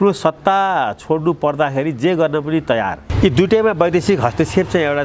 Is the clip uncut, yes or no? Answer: no